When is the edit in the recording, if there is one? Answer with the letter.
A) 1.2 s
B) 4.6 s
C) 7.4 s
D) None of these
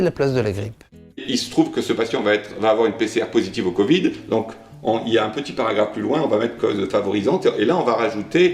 A